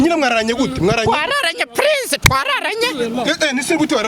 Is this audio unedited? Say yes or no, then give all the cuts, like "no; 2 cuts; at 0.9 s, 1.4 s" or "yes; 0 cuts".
yes; 0 cuts